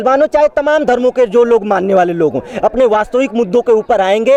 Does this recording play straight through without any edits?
yes; 0 cuts

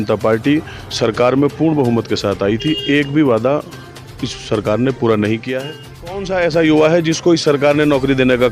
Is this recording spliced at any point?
yes; 1 cut; at 6.2 s

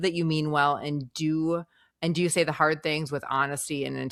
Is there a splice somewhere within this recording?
no; 0 cuts

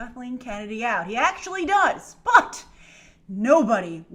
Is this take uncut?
yes; 0 cuts

